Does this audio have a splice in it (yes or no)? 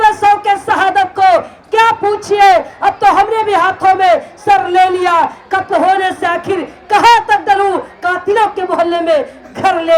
no